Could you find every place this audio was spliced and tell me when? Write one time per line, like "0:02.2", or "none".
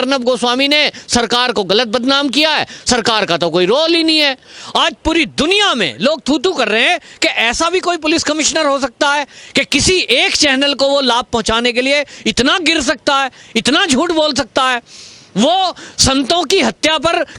0:04.4